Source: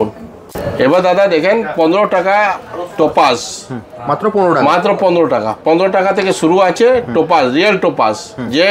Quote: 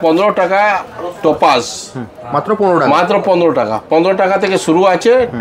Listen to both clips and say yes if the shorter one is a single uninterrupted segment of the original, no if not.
yes